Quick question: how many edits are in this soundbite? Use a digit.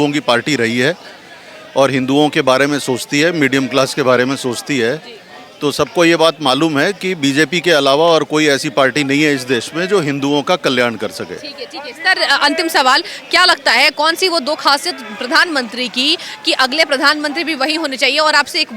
0